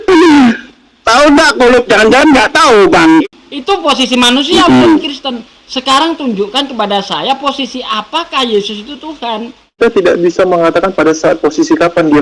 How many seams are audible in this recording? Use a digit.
2